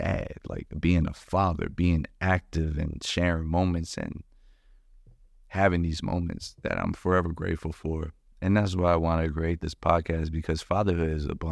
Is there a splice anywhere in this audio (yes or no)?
no